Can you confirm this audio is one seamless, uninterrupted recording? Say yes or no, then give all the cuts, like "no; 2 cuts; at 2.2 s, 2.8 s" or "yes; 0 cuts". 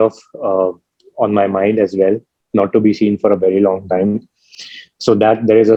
yes; 0 cuts